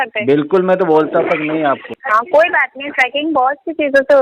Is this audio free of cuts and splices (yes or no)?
no